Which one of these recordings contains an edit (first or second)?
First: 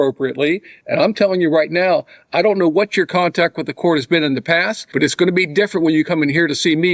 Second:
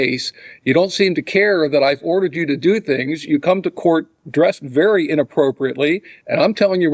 first